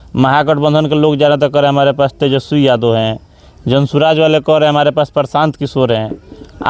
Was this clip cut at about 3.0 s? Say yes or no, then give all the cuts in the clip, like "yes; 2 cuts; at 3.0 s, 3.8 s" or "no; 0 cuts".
no; 0 cuts